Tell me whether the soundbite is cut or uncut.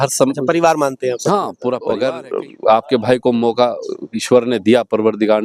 cut